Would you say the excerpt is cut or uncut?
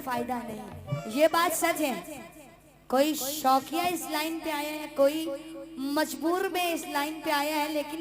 cut